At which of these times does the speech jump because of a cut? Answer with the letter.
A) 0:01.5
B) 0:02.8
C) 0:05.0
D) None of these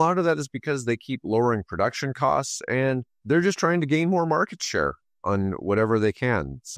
D